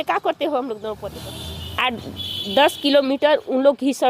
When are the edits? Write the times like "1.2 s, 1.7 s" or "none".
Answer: 1.0 s